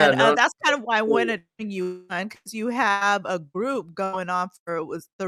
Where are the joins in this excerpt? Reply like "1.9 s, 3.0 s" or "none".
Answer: none